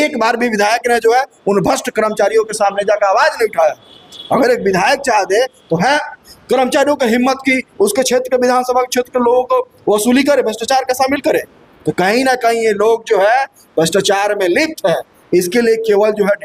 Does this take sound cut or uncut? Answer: uncut